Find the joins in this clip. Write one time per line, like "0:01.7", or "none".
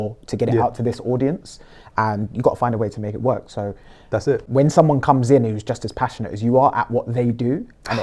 0:04.5

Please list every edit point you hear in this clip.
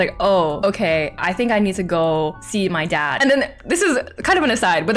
0:03.1

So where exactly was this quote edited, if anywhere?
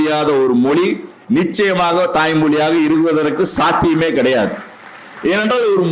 0:01.1

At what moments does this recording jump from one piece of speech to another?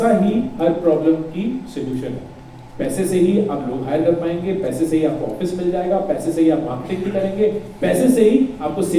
none

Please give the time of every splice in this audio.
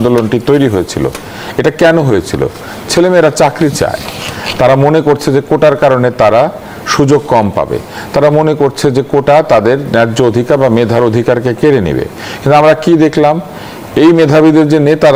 none

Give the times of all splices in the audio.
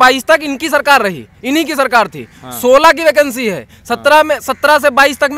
none

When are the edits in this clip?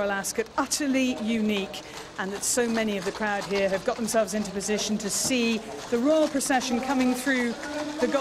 none

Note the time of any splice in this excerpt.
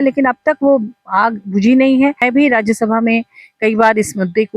0:02.2

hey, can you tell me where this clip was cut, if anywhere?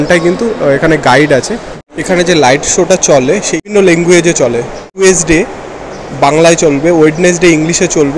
0:01.6
0:03.5
0:05.0

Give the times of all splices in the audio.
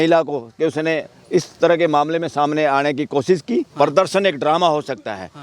0:03.7

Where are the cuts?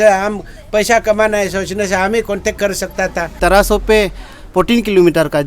0:03.4

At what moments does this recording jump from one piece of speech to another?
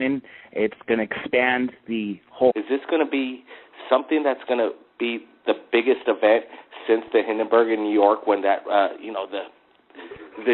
none

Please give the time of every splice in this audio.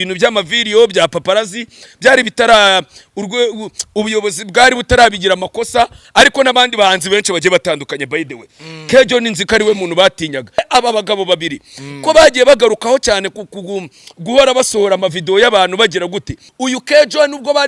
0:06.0
0:10.7
0:16.4

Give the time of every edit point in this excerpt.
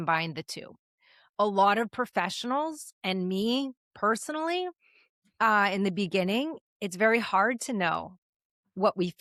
none

